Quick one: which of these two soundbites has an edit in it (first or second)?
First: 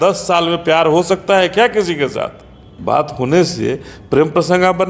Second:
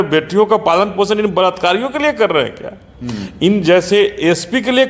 first